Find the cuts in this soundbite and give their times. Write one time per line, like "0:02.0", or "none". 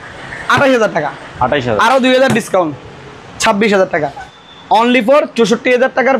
0:04.3